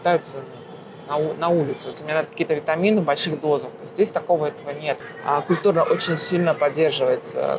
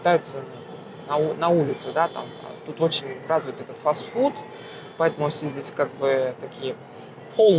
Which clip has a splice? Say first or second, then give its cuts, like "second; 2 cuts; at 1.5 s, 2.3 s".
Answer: first; 2 cuts; at 1.9 s, 5.1 s